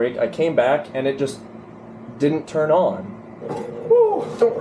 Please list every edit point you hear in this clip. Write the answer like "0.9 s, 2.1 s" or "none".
3.4 s